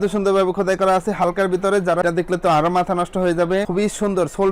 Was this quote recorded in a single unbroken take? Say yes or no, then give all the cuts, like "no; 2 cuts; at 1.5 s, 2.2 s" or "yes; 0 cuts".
no; 1 cut; at 2.0 s